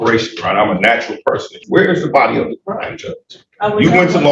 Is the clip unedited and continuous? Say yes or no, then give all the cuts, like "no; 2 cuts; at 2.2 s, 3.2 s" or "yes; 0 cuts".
no; 1 cut; at 1.6 s